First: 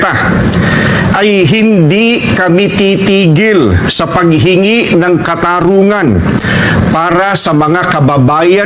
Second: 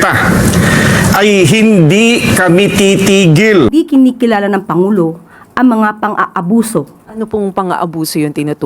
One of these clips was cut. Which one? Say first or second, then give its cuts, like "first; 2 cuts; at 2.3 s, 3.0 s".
second; 2 cuts; at 3.7 s, 7.0 s